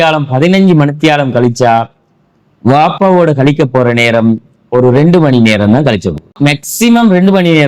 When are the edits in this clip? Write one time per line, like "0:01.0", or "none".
0:06.3